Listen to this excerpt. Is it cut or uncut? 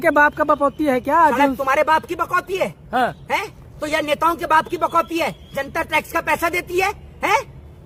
uncut